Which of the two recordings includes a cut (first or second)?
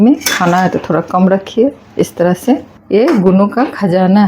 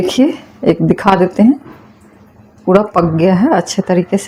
first